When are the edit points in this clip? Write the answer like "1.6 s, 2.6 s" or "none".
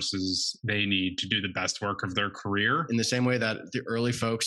2.8 s